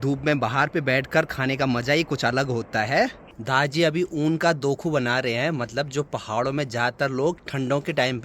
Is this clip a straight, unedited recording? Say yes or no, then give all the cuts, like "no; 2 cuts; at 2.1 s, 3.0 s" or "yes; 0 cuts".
no; 1 cut; at 3.3 s